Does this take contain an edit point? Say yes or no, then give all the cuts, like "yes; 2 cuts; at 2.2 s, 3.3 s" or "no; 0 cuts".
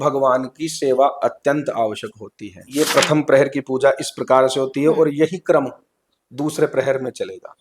yes; 1 cut; at 2.9 s